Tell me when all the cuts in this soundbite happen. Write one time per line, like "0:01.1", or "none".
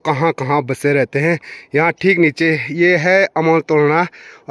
none